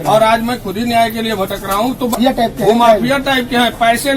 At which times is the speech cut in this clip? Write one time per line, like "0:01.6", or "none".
0:02.1